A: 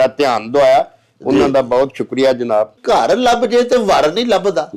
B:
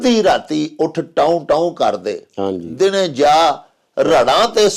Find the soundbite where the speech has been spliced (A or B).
A